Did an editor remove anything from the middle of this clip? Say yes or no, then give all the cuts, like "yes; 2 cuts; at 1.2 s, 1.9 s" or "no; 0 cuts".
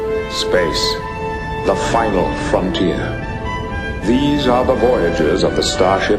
no; 0 cuts